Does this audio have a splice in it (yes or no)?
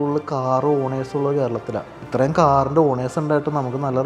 yes